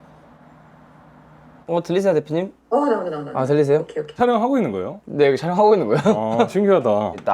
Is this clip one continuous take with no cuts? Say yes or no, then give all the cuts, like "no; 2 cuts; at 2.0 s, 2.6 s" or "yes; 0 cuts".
no; 1 cut; at 1.6 s